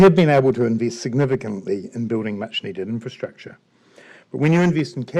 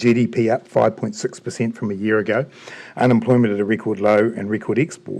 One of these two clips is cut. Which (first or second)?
second